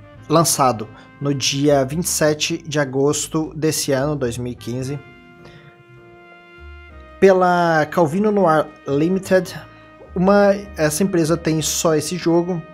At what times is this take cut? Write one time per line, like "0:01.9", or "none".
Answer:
0:07.4